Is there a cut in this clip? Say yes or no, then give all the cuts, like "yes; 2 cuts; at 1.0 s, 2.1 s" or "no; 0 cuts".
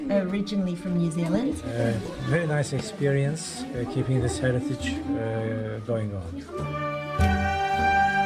yes; 1 cut; at 1.7 s